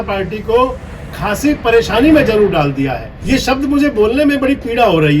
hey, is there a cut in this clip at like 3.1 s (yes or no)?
yes